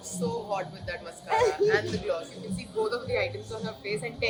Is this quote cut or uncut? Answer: uncut